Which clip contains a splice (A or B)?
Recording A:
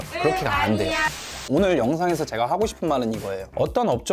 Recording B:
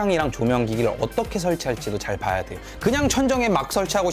A